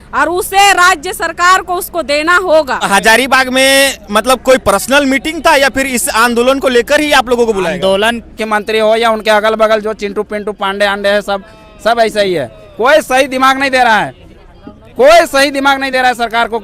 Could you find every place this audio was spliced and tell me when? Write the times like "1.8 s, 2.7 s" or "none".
2.8 s, 8.3 s